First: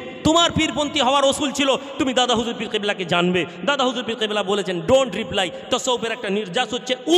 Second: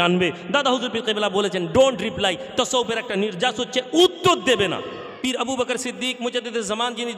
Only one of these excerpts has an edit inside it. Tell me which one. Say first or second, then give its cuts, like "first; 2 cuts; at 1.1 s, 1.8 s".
second; 1 cut; at 5.0 s